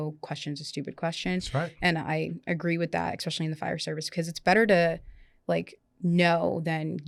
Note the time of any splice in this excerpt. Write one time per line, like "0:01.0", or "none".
none

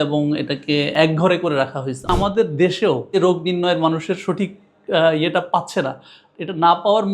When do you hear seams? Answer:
0:00.9
0:02.1
0:03.2

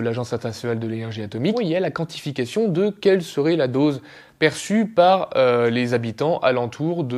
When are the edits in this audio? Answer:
0:01.6

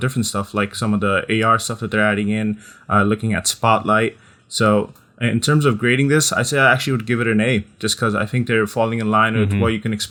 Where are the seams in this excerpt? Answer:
none

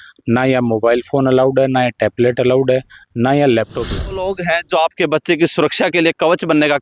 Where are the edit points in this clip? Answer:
0:04.2

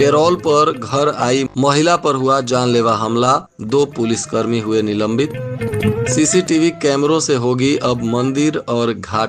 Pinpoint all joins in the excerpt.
none

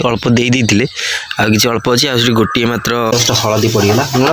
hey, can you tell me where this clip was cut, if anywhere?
0:03.1

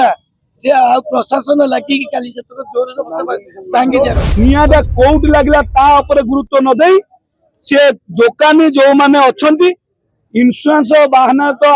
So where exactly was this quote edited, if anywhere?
0:04.2

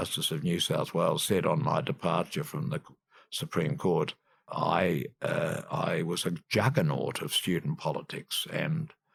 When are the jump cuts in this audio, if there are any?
none

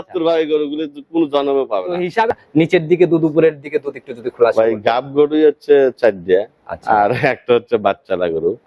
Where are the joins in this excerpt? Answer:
0:02.3

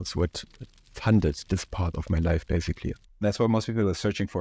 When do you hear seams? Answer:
0:03.1

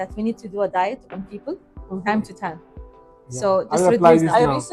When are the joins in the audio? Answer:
none

